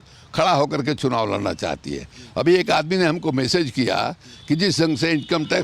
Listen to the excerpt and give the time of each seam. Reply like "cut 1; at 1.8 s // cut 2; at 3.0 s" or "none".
none